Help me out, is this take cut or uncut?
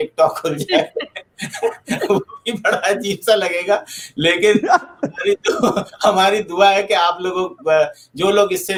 uncut